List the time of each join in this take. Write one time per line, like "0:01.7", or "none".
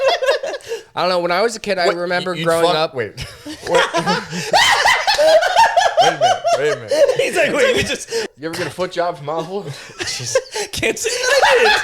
0:08.2